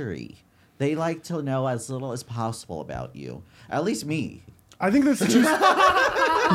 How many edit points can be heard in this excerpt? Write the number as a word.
zero